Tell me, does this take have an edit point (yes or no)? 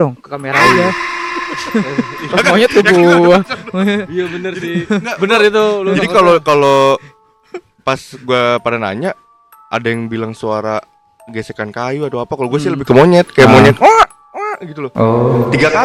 no